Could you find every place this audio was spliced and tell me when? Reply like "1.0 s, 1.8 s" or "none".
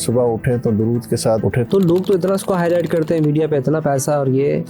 1.6 s

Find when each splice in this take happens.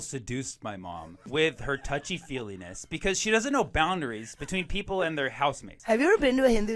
1.3 s, 5.7 s

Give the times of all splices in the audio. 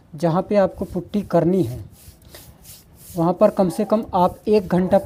none

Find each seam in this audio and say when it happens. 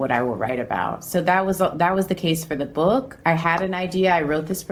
none

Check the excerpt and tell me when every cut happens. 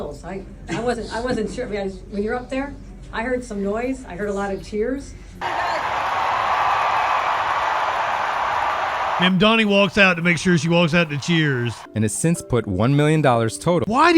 5.4 s, 11.8 s

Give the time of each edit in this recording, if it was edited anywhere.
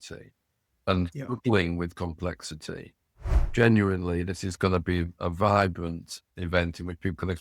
3.4 s, 6.3 s

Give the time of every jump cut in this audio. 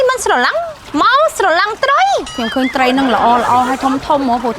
2.4 s

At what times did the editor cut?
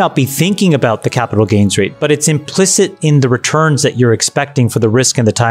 none

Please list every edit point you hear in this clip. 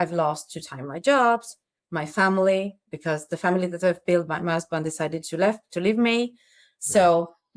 none

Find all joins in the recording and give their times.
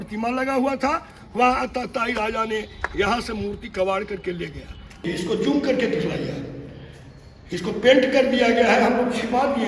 5.0 s

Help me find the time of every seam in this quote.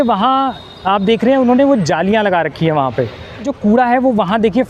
3.5 s

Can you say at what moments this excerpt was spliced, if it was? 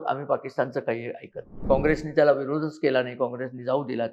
1.6 s

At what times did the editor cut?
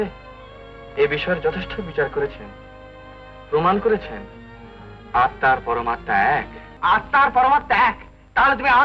6.6 s

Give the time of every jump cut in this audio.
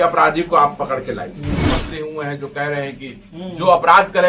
1.7 s

